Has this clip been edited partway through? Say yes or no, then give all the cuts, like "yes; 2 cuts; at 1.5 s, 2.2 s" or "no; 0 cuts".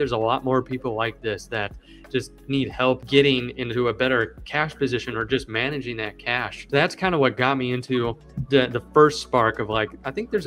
yes; 2 cuts; at 3.0 s, 6.6 s